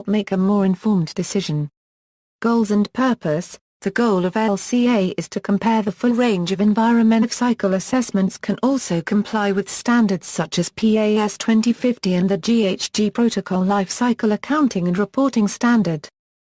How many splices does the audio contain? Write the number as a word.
zero